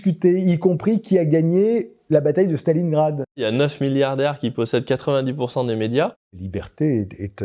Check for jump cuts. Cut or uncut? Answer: cut